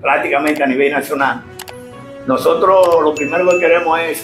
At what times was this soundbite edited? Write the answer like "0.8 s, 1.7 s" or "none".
none